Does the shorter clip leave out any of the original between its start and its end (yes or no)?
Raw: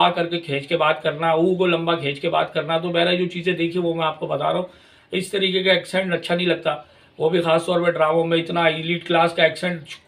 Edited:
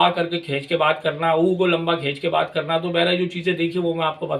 no